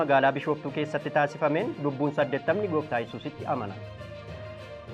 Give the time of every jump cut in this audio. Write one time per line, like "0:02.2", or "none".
0:03.8